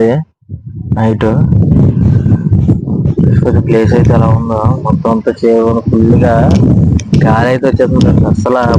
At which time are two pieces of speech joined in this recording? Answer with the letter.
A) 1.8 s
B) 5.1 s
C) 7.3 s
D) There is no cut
D